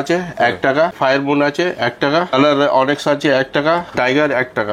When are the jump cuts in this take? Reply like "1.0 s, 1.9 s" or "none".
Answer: 0.9 s, 2.3 s, 3.9 s